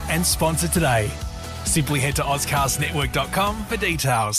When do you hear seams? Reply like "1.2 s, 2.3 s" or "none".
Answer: none